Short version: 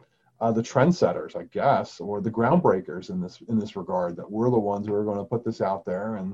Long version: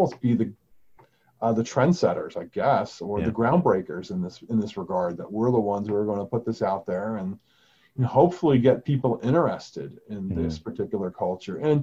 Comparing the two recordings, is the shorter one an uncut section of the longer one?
yes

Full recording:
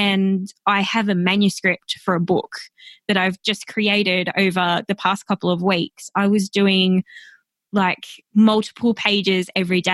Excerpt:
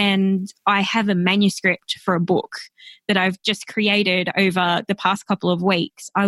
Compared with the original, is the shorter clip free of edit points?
yes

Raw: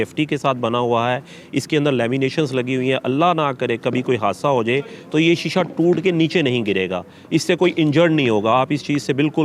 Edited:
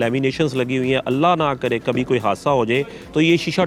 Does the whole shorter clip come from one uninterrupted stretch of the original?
yes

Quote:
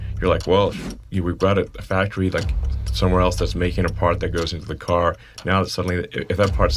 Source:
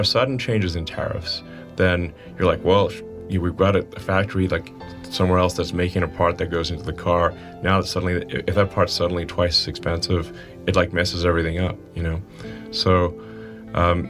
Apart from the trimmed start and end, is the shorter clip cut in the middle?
no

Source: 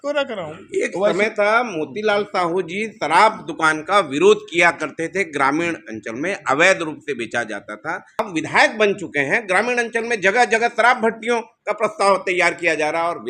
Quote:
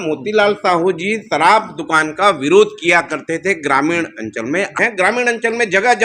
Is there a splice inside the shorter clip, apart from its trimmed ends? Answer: yes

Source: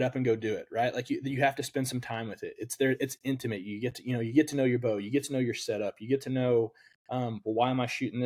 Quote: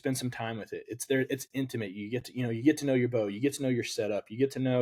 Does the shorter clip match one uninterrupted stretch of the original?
yes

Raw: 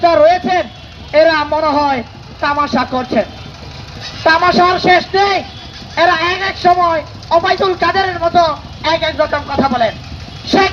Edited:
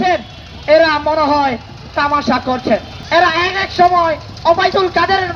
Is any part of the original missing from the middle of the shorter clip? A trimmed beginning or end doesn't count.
yes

